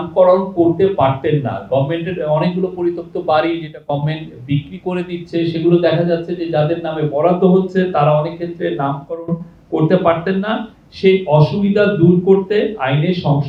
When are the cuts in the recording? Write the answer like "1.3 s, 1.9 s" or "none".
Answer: none